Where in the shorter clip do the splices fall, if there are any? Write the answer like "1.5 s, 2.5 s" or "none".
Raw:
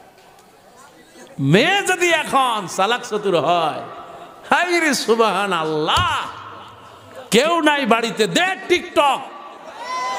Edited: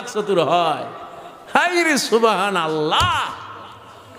none